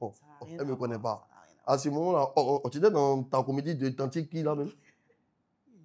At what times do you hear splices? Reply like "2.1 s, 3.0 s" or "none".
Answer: none